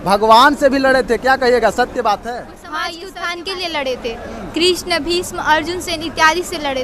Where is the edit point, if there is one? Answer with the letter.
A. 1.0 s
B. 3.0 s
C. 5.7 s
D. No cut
B